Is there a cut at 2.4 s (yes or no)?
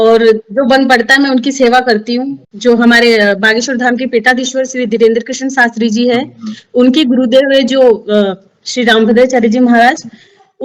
yes